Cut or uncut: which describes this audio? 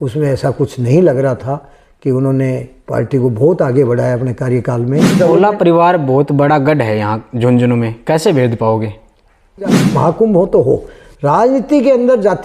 cut